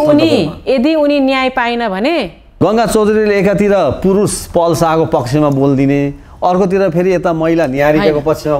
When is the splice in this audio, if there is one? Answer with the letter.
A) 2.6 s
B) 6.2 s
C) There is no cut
A